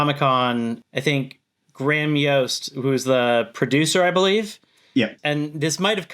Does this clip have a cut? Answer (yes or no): no